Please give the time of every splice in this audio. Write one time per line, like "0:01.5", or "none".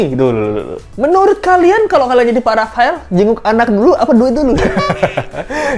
none